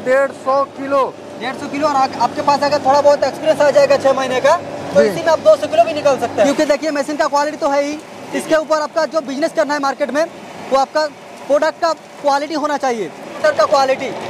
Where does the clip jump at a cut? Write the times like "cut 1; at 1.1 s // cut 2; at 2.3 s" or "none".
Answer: cut 1; at 6.5 s // cut 2; at 13.3 s